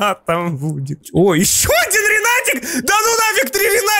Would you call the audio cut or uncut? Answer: cut